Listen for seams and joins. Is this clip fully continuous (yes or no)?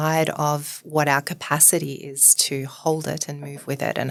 yes